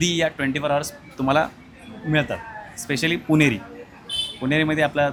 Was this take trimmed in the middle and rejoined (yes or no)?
no